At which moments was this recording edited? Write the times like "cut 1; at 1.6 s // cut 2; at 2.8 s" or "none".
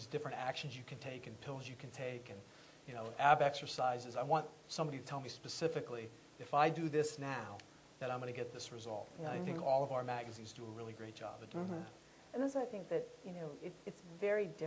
cut 1; at 2.0 s